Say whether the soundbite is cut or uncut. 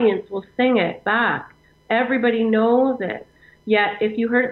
uncut